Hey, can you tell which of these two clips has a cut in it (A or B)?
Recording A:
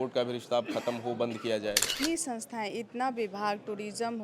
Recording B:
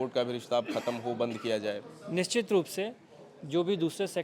A